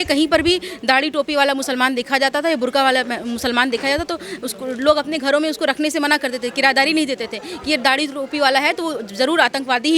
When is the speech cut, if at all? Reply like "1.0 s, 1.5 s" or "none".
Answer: none